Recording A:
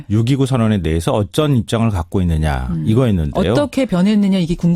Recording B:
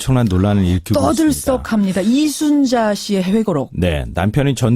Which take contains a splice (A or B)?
A